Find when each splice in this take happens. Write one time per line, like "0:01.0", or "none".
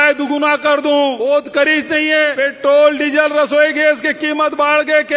0:01.2
0:02.3